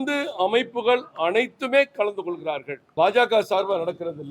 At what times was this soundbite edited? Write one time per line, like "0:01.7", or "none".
0:02.8